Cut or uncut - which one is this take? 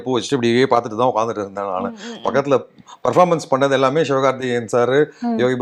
uncut